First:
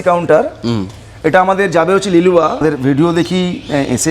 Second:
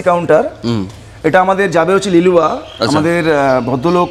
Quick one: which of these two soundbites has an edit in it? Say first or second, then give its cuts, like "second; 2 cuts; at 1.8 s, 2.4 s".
first; 1 cut; at 2.6 s